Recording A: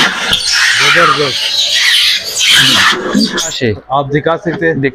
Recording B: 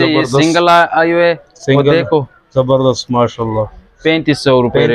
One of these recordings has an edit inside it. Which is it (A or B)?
A